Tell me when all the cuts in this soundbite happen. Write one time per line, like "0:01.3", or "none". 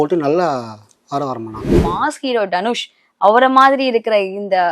0:01.8